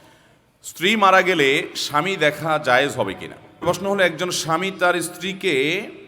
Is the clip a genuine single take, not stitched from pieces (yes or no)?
no